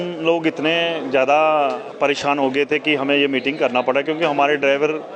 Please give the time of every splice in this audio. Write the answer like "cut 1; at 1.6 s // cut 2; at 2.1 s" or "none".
none